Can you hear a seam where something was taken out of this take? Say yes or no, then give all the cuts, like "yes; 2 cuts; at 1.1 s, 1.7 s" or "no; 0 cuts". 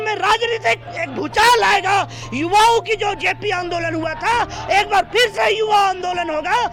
no; 0 cuts